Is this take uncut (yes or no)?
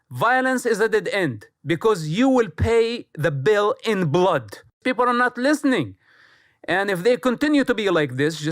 no